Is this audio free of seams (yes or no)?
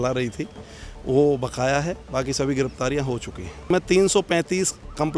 no